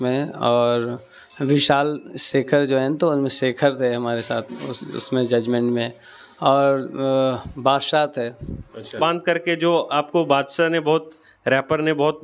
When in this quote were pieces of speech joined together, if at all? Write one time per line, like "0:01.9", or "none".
0:08.9